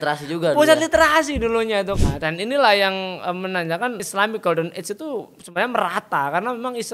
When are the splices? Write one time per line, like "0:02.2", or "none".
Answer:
0:01.9
0:04.0